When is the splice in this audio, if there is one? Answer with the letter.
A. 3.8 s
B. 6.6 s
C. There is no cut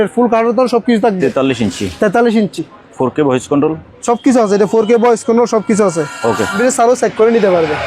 B